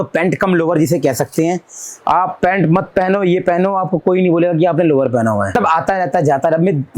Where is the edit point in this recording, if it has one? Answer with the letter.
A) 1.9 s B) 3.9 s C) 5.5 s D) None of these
C